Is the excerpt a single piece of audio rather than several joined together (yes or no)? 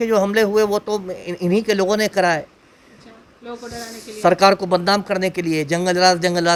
yes